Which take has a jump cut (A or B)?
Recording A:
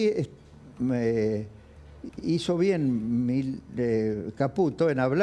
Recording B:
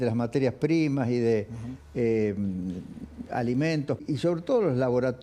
B